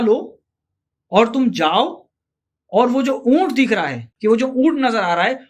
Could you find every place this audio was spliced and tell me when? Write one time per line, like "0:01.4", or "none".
0:04.1